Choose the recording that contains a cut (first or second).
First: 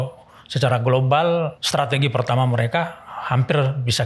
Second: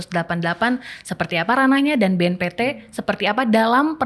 first